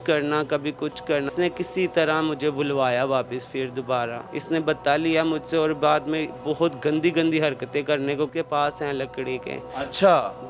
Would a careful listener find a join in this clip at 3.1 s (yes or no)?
no